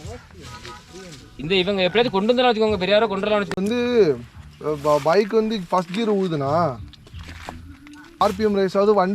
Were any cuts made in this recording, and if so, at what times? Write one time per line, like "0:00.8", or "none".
0:03.6
0:08.2